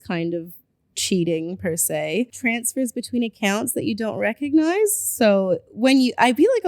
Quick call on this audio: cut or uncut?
cut